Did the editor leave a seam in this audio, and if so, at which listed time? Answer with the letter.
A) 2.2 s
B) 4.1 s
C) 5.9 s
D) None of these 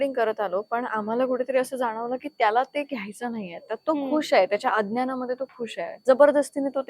C